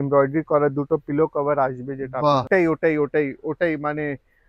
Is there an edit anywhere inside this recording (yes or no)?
yes